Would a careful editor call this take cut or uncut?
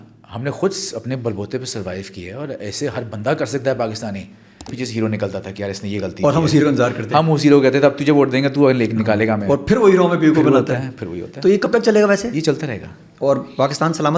cut